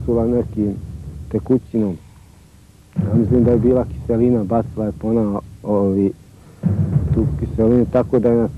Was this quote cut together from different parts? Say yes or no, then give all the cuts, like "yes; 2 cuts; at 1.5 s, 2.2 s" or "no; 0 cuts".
yes; 1 cut; at 6.7 s